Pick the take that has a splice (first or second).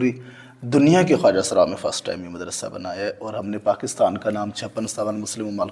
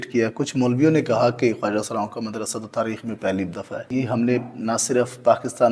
second